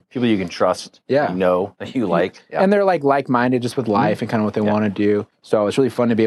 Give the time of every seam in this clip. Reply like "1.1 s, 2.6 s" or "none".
5.3 s